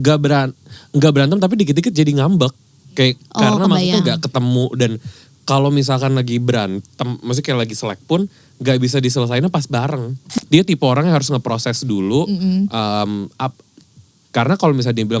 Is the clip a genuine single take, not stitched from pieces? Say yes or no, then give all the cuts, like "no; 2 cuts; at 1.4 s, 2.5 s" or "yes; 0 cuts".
no; 1 cut; at 10.2 s